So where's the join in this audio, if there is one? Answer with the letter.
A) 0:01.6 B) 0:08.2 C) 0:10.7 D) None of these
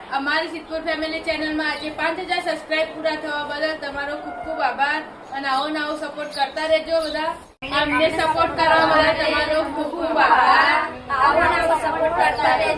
D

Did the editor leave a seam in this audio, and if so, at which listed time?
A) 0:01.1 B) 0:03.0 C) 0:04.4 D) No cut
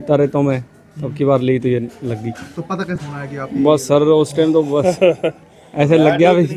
B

